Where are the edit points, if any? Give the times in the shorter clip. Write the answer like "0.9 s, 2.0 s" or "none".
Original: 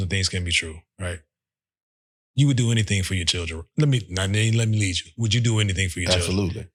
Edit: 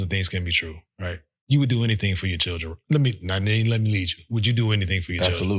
1.3 s